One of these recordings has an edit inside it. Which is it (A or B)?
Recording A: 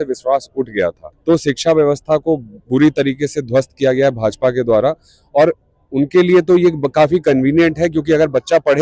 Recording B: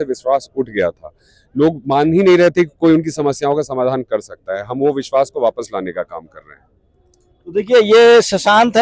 A